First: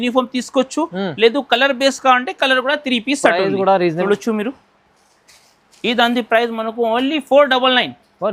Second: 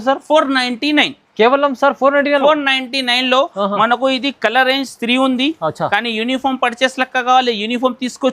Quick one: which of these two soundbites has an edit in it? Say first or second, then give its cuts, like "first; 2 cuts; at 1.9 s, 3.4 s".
first; 1 cut; at 4.0 s